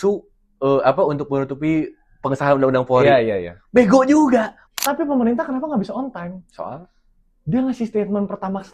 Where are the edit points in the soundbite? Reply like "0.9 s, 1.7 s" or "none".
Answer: 4.6 s